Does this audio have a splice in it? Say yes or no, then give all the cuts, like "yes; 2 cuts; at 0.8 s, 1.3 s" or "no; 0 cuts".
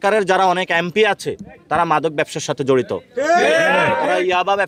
no; 0 cuts